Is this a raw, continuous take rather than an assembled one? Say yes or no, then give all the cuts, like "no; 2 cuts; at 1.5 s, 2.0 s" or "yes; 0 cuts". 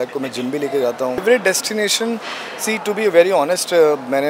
no; 1 cut; at 1.2 s